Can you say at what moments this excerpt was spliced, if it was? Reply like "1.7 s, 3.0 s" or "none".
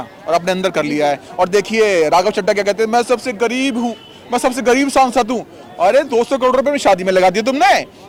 none